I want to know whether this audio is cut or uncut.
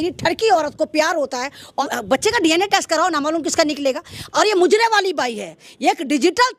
cut